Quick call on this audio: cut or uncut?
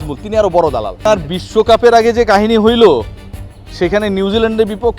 cut